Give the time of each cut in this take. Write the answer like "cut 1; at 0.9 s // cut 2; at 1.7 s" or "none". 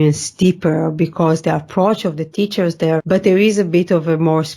cut 1; at 3.0 s